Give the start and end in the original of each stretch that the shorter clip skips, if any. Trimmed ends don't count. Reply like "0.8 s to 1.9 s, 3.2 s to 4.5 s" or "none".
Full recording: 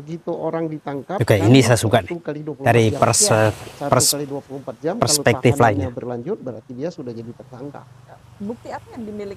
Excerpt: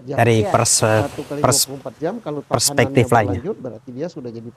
5.8 s to 6.1 s